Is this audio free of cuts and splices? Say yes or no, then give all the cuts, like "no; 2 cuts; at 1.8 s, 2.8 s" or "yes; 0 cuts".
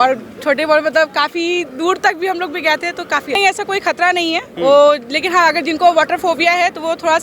no; 1 cut; at 3.4 s